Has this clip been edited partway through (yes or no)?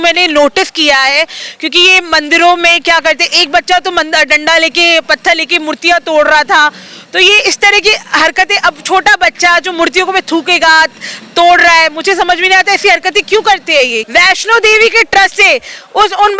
yes